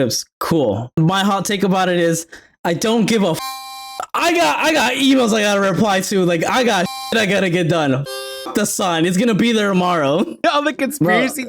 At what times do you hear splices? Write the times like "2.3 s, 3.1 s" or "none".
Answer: 1.0 s, 3.6 s, 10.4 s